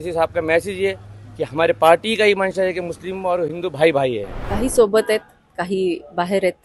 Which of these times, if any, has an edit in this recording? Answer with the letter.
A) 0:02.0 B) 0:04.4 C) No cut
B